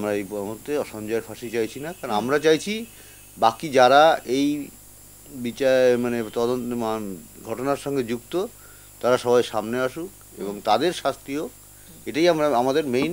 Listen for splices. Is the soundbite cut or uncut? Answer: uncut